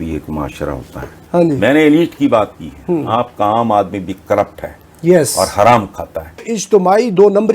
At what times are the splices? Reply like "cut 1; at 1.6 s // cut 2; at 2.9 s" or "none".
cut 1; at 1.2 s // cut 2; at 6.5 s